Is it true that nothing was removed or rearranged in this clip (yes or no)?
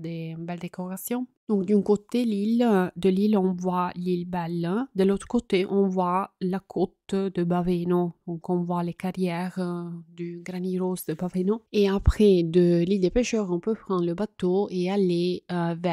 no